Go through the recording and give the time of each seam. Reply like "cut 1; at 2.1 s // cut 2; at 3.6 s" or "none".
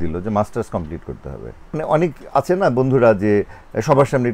cut 1; at 1.8 s